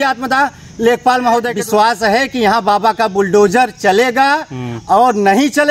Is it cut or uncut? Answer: cut